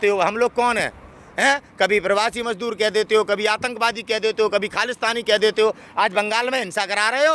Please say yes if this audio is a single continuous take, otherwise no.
yes